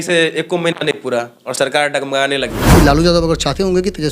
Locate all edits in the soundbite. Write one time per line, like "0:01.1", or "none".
0:02.6